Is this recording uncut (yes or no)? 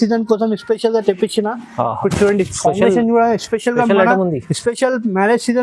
yes